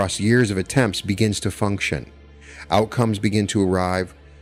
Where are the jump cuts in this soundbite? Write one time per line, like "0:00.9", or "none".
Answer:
none